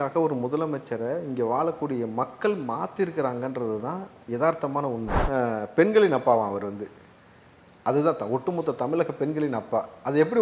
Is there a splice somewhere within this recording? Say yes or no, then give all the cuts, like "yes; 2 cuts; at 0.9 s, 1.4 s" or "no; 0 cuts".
yes; 1 cut; at 5.1 s